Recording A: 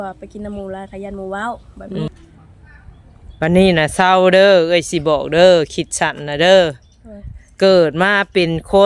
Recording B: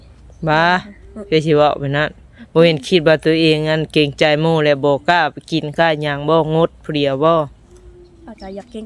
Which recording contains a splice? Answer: A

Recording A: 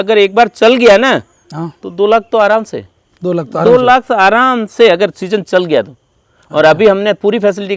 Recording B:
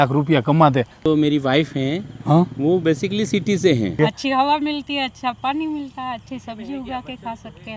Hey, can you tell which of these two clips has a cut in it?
B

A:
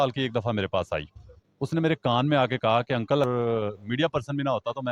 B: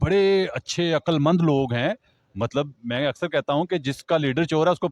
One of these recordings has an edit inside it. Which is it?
A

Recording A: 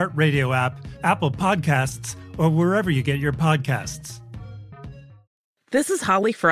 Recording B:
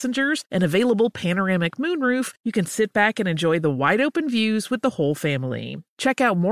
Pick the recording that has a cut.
A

